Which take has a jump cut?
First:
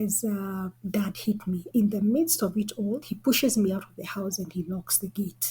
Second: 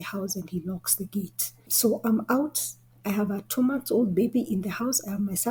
first; 2 cuts; at 1.7 s, 3.1 s

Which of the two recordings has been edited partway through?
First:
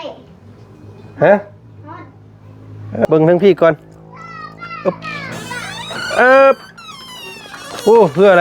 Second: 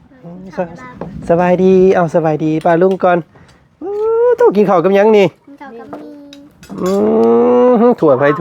first; 1 cut; at 3.1 s

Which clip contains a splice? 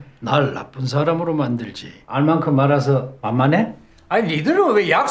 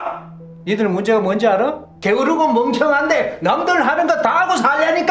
first; 1 cut; at 2.0 s

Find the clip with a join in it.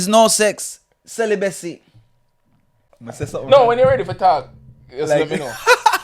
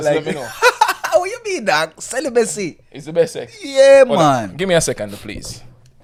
first; 1 cut; at 2.3 s

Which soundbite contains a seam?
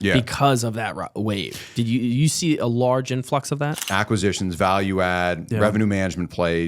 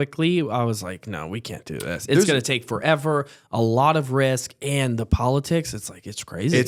first; 1 cut; at 3.8 s

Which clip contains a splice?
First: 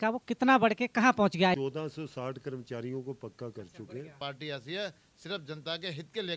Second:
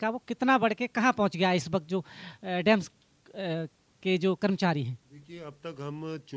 first; 2 cuts; at 1.5 s, 4.2 s

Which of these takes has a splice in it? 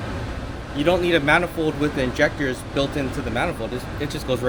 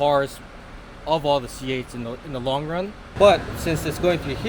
second; 1 cut; at 3.0 s

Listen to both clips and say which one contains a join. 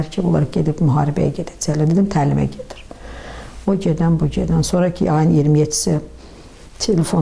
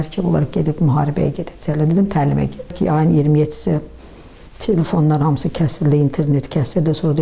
second; 1 cut; at 2.7 s

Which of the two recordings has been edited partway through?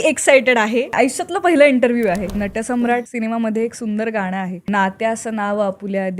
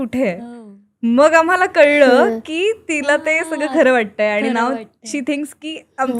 first; 3 cuts; at 0.9 s, 2.8 s, 4.6 s

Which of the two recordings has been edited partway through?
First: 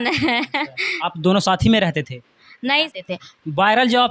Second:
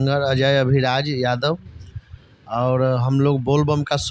first; 1 cut; at 2.9 s

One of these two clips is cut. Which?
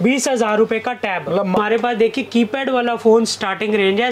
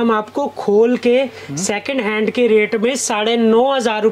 first; 1 cut; at 1.6 s

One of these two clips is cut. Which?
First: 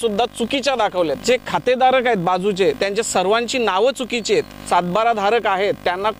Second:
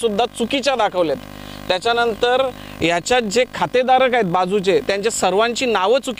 first; 2 cuts; at 1.2 s, 4.7 s

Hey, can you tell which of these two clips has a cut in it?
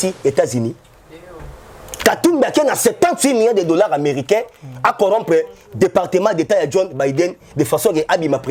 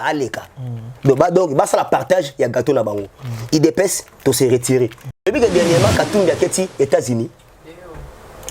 second; 1 cut; at 5.3 s

